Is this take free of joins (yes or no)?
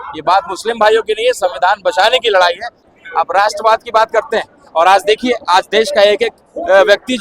no